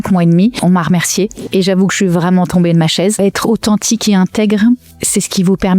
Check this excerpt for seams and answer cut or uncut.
cut